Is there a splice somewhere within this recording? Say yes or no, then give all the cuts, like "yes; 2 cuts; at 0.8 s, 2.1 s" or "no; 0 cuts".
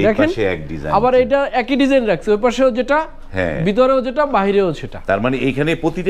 no; 0 cuts